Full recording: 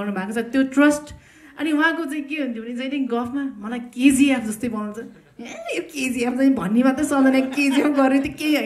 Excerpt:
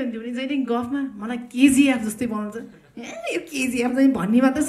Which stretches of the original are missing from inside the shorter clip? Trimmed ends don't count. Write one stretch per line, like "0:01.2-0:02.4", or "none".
none